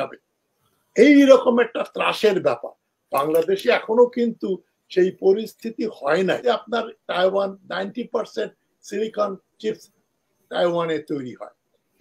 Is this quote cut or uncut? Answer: cut